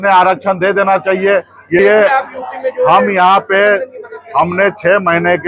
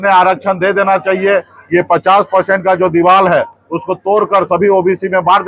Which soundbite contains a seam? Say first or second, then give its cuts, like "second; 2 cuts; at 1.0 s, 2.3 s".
first; 1 cut; at 1.8 s